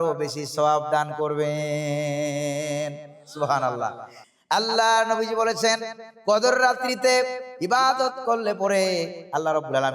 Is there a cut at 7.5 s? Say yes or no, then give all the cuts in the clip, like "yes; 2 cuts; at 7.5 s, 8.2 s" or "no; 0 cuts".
no; 1 cut; at 4.1 s